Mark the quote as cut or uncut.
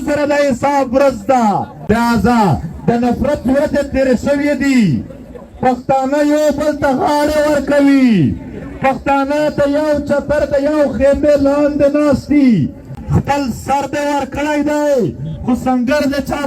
cut